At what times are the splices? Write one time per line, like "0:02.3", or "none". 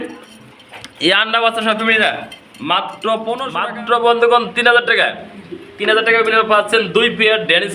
0:03.5